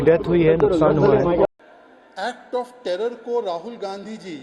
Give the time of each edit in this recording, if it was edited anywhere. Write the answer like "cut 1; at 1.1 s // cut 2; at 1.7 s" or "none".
cut 1; at 1.5 s